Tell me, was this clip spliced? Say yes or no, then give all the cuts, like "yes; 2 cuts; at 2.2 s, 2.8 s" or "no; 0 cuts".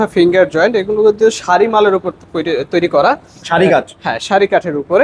no; 0 cuts